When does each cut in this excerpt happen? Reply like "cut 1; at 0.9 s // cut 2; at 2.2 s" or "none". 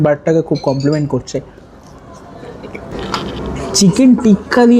cut 1; at 3.0 s